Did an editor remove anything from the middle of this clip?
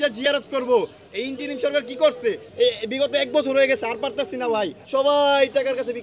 yes; 2 cuts; at 2.4 s, 4.8 s

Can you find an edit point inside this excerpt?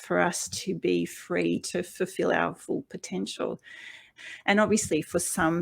yes; 1 cut; at 4.2 s

